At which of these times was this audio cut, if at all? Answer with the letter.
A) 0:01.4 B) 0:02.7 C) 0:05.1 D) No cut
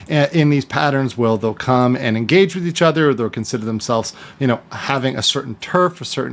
D